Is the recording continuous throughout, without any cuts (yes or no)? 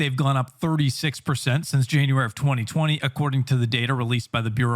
yes